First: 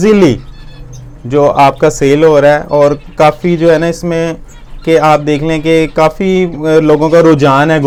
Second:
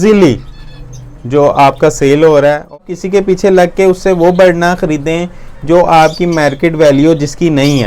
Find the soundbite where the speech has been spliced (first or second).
second